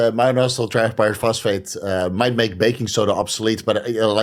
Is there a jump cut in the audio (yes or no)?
no